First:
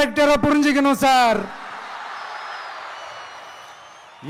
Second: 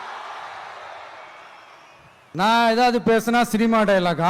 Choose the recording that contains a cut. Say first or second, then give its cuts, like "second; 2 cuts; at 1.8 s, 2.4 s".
second; 1 cut; at 2.3 s